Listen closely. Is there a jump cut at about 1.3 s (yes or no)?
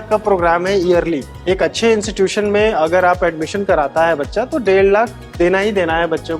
yes